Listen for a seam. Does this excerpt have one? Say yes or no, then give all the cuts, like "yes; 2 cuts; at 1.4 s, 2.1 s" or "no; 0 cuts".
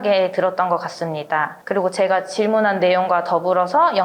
yes; 1 cut; at 1.6 s